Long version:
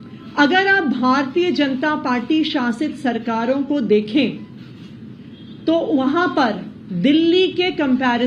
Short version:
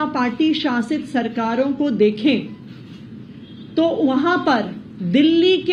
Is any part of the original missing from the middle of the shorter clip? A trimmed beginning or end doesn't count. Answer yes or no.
no